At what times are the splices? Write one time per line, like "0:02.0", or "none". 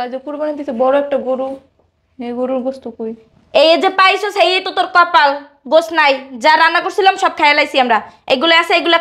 none